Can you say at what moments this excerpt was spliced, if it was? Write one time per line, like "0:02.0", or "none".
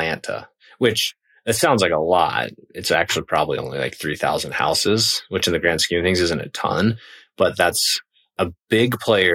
0:08.3